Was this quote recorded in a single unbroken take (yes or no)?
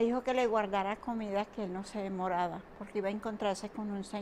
yes